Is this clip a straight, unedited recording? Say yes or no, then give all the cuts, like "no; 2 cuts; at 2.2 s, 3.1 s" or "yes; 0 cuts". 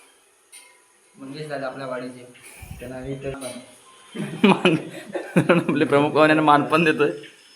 no; 1 cut; at 3.4 s